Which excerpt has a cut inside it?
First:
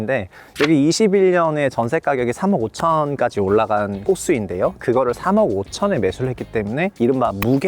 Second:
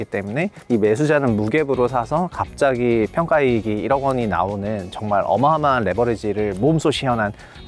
first; 2 cuts; at 4.0 s, 6.9 s

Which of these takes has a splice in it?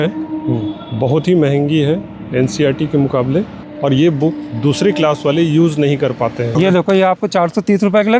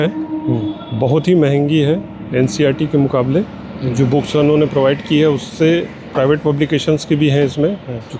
first; 2 cuts; at 3.6 s, 6.5 s

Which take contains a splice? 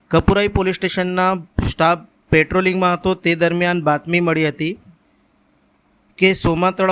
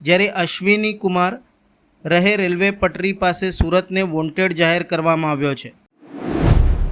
second; 1 cut; at 6.0 s

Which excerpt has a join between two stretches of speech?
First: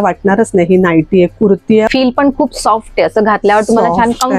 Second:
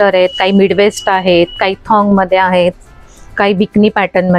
first; 1 cut; at 1.9 s

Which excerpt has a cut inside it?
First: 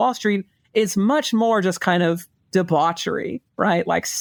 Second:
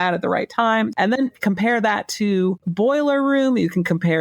second; 2 cuts; at 0.9 s, 2.6 s

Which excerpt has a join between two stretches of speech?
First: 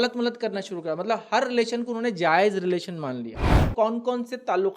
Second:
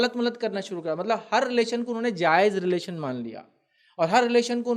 first; 1 cut; at 3.7 s

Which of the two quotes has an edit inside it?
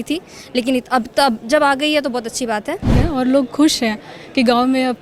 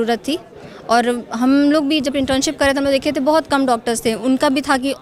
first; 1 cut; at 2.9 s

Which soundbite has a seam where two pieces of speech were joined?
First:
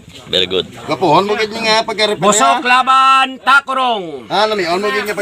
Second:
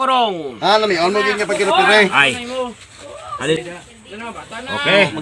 second; 1 cut; at 3.6 s

